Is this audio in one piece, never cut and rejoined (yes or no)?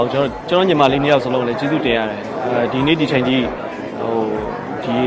yes